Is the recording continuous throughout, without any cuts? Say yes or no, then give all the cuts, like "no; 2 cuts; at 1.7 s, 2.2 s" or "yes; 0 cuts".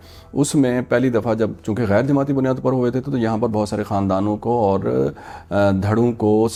yes; 0 cuts